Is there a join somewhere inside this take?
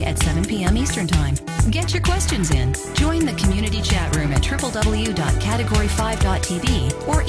no; 0 cuts

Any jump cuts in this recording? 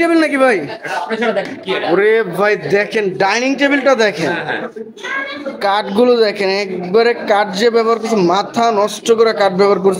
no; 0 cuts

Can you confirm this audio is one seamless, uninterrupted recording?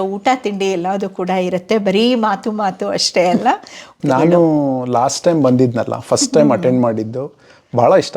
no; 1 cut; at 3.9 s

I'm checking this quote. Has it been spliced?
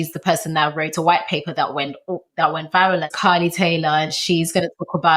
yes; 1 cut; at 3.1 s

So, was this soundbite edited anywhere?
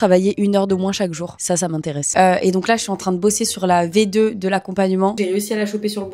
yes; 2 cuts; at 2.1 s, 5.2 s

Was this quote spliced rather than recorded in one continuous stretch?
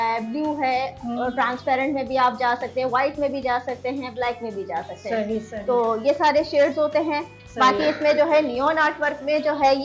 no; 0 cuts

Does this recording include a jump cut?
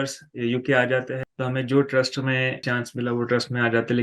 yes; 2 cuts; at 1.2 s, 2.6 s

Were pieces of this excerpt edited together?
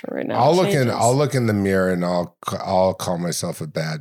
no; 0 cuts

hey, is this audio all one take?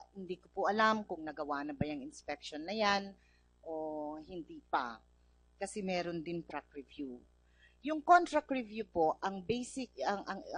yes; 0 cuts

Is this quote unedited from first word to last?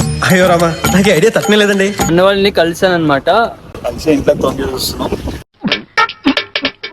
no; 2 cuts; at 2.0 s, 3.7 s

